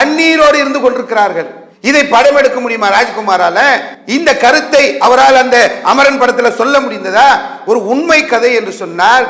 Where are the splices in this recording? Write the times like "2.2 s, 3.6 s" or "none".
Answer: 3.9 s